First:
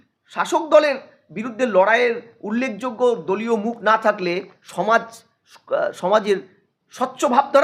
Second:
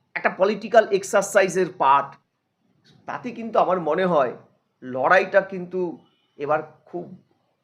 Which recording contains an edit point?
second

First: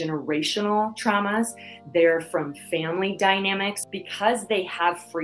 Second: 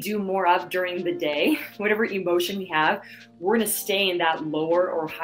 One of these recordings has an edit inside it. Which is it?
first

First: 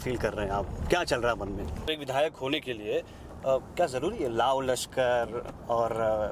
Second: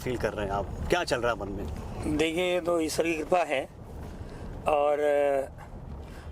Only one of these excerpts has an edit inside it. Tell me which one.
first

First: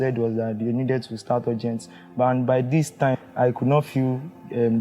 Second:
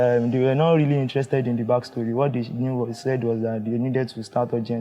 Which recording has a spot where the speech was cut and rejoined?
first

